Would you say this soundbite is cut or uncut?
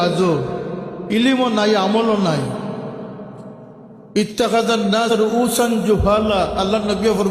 cut